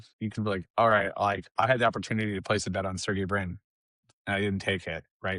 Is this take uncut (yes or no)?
yes